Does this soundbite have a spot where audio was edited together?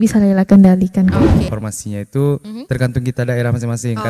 yes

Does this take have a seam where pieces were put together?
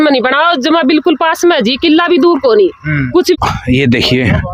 yes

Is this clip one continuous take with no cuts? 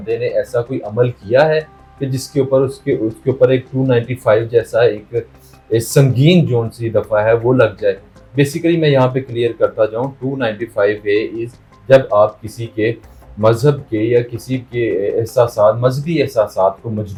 yes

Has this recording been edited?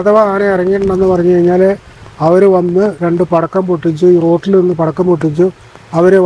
no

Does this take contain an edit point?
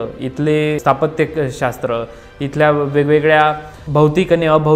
yes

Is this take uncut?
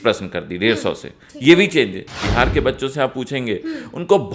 no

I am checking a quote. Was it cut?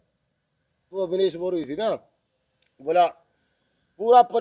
yes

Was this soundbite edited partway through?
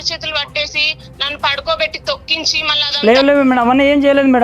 yes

